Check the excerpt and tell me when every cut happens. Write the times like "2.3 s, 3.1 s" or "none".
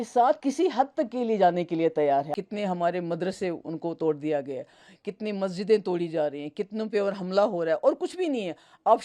2.3 s